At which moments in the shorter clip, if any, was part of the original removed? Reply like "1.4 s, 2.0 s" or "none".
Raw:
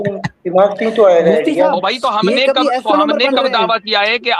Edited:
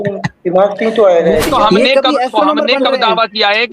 1.5 s